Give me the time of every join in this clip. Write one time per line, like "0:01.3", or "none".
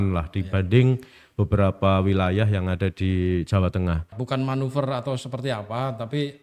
0:04.2